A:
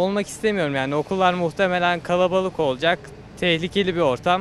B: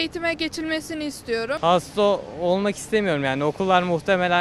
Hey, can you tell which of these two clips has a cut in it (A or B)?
B